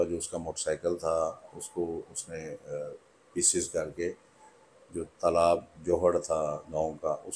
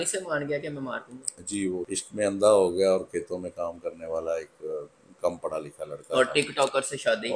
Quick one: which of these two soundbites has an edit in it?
second; 1 cut; at 2.0 s

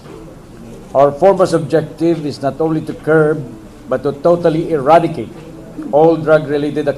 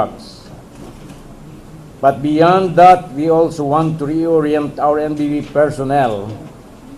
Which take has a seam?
first; 1 cut; at 2.3 s

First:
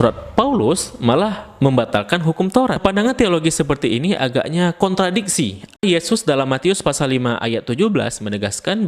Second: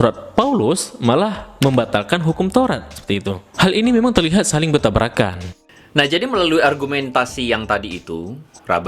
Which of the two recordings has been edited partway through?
first; 2 cuts; at 2.8 s, 5.8 s

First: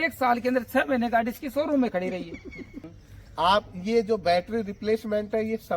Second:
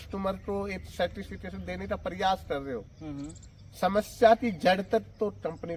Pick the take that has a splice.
first; 1 cut; at 3.0 s

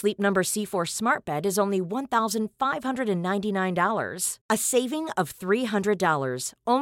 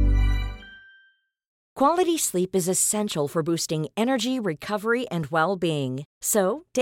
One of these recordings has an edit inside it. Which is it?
second; 1 cut; at 1.5 s

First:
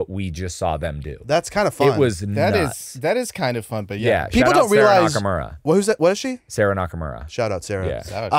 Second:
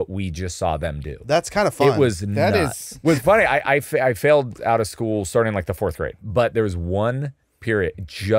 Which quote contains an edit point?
second; 2 cuts; at 2.8 s, 6.2 s

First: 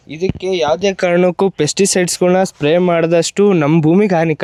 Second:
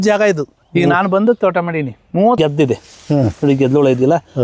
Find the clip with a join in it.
second; 1 cut; at 2.4 s

